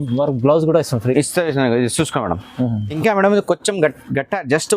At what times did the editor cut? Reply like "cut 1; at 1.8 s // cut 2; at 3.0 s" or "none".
cut 1; at 2.4 s